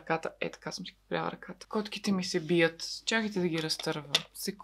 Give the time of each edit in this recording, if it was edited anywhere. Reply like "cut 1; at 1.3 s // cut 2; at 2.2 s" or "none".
cut 1; at 1.7 s

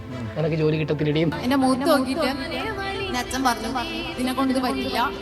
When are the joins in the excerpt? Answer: cut 1; at 1.3 s

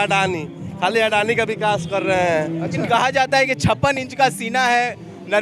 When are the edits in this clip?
cut 1; at 2.8 s

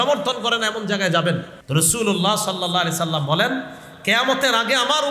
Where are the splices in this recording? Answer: cut 1; at 1.6 s

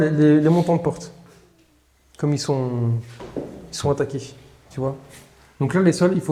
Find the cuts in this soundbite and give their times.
none

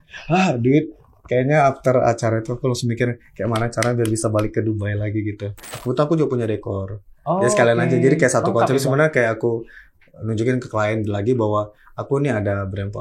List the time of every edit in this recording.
cut 1; at 5.7 s

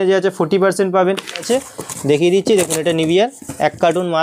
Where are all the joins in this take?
cut 1; at 1.5 s

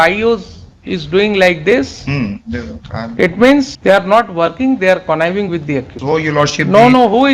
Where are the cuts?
cut 1; at 3.7 s // cut 2; at 5.9 s

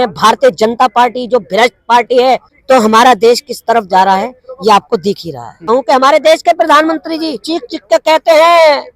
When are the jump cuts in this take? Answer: cut 1; at 2.5 s // cut 2; at 5.6 s

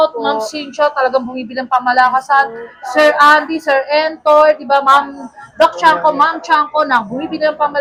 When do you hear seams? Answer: none

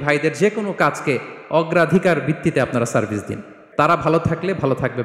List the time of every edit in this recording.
cut 1; at 3.6 s

